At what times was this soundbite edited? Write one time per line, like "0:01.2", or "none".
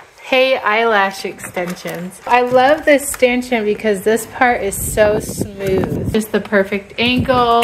0:02.3
0:06.1